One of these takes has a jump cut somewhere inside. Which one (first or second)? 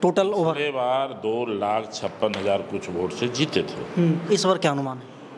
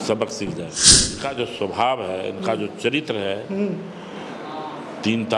second